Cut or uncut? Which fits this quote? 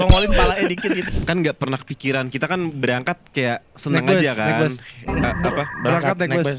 cut